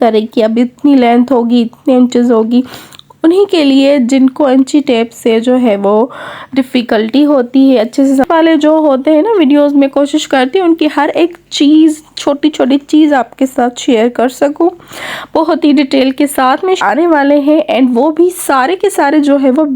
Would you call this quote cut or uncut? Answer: cut